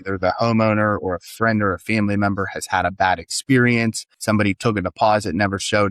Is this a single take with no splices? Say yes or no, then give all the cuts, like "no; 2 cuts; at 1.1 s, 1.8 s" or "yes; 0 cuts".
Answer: no; 1 cut; at 4.1 s